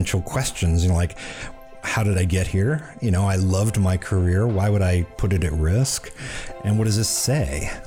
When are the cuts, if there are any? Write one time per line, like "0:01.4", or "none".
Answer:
none